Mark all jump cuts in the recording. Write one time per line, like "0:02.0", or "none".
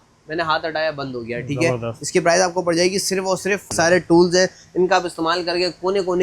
0:03.7